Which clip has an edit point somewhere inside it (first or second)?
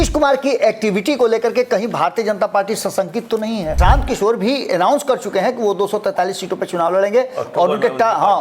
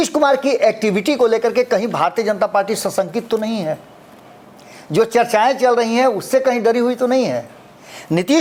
first